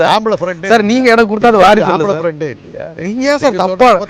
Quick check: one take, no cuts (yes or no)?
no